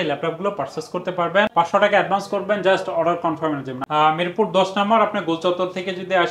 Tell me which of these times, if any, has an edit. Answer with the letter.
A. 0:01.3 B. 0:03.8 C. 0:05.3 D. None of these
B